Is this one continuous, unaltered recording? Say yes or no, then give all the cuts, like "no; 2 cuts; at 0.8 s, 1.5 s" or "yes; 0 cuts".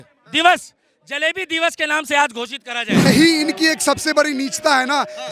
no; 1 cut; at 3.1 s